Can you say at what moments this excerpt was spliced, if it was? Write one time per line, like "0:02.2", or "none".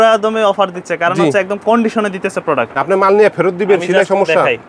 0:02.7